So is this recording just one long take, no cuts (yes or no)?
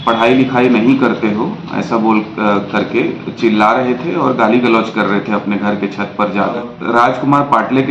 no